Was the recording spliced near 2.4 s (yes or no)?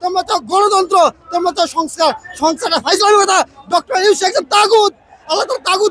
no